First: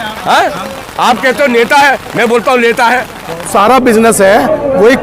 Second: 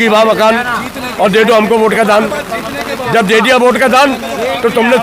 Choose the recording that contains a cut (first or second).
first